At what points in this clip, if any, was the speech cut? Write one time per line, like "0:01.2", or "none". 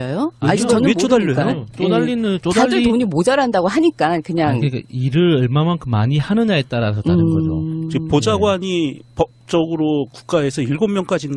0:06.8

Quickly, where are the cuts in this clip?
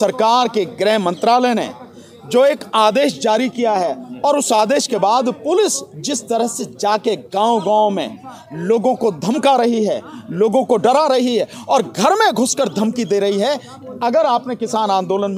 none

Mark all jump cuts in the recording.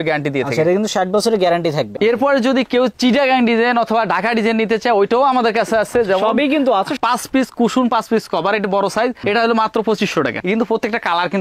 0:01.9
0:07.0
0:10.4

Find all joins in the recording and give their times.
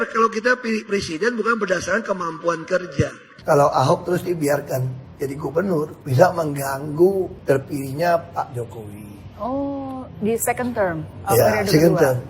0:03.3
0:06.0
0:07.4

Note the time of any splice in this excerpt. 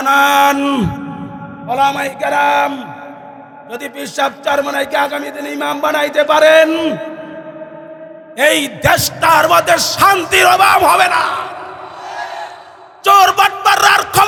none

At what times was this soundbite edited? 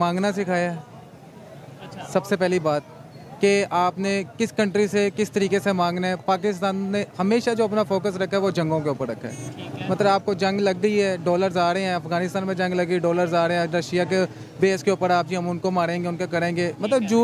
none

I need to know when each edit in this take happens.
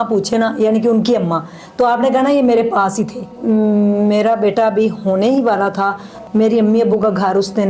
0:03.4
0:06.1

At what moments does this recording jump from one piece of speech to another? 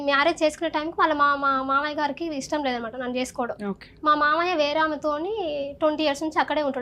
none

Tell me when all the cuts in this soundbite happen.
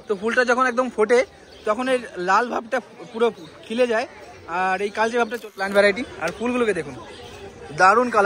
0:05.6

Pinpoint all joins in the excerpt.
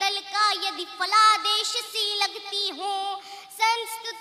none

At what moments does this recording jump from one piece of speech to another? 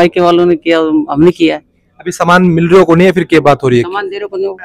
none

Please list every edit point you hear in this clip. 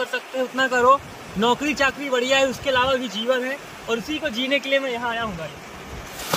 none

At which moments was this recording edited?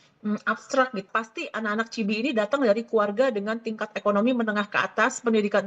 0:01.0

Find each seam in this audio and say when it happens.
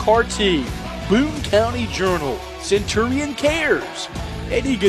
none

